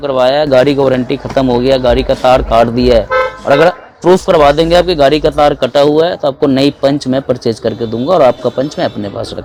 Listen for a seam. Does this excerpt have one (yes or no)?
no